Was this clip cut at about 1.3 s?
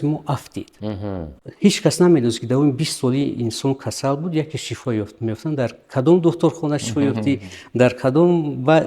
yes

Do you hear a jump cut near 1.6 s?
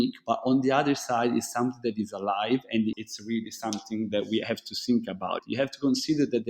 no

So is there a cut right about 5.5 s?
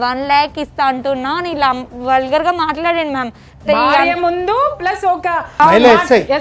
yes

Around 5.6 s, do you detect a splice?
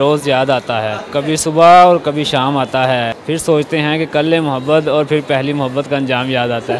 no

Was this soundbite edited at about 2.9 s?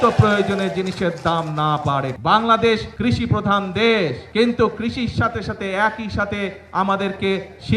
yes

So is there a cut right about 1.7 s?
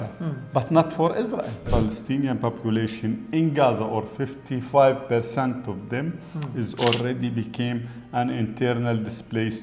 yes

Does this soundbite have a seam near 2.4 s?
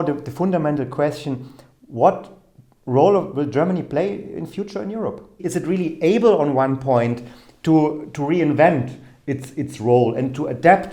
no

